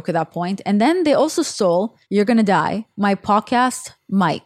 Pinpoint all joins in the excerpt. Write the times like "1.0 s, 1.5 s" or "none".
2.0 s, 2.9 s